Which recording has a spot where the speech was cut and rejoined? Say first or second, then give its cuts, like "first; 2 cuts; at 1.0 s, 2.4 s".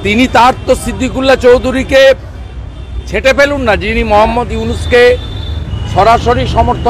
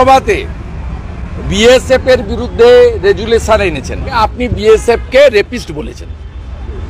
second; 1 cut; at 4.2 s